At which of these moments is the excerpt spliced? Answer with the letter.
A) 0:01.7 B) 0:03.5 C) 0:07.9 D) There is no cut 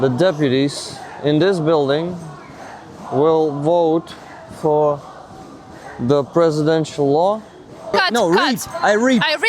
C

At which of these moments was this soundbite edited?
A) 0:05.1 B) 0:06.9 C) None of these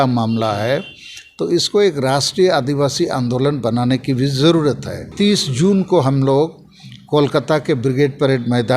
A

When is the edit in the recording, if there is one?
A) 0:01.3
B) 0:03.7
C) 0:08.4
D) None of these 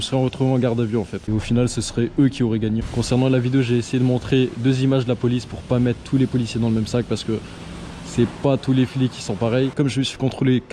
A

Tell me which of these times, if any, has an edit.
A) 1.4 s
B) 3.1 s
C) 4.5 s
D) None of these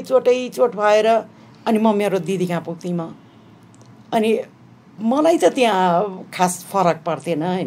D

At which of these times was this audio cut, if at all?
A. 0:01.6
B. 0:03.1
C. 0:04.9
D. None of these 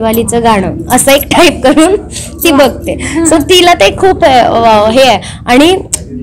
D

